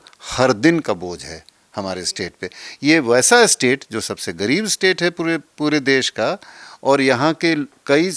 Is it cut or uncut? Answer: uncut